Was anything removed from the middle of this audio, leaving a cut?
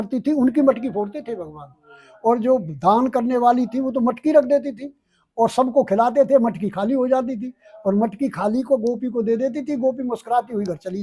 no; 0 cuts

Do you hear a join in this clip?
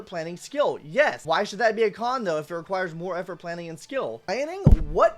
yes; 2 cuts; at 1.2 s, 4.2 s

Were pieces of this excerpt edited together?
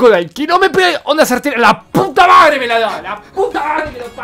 no; 0 cuts

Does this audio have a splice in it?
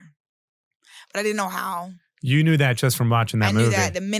no; 0 cuts

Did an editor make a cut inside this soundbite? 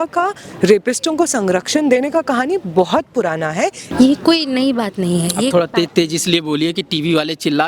yes; 1 cut; at 3.8 s

